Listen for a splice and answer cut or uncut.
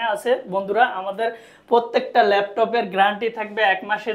uncut